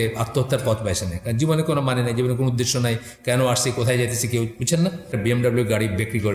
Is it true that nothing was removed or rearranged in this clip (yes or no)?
no